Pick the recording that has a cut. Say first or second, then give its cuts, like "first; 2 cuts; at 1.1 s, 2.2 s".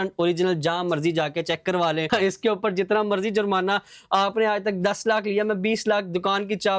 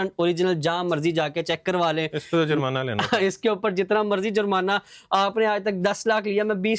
first; 1 cut; at 2.1 s